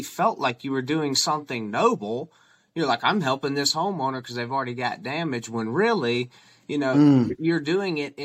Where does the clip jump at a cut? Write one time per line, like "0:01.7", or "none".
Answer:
none

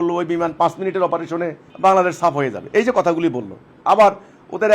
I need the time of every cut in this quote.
0:01.6

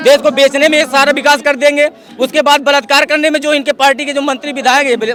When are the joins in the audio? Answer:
none

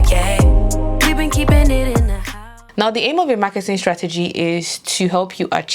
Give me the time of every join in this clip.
0:02.3

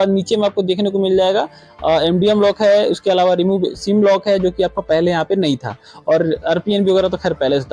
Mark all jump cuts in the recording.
none

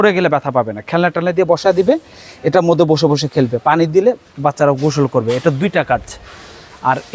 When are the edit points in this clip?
none

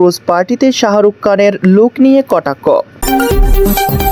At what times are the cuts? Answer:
0:03.0

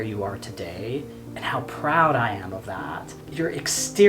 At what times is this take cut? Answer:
0:01.2
0:03.2

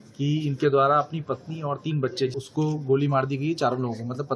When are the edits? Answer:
0:02.4

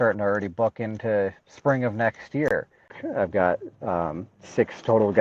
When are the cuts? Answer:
0:03.0

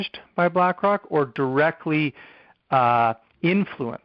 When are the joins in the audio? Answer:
none

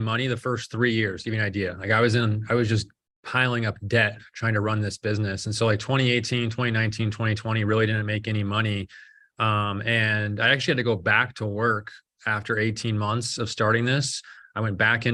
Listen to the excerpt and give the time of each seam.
none

